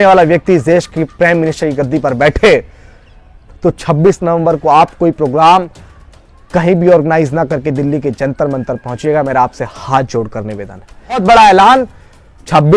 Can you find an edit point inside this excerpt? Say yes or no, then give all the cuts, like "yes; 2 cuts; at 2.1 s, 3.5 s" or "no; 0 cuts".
yes; 1 cut; at 11.2 s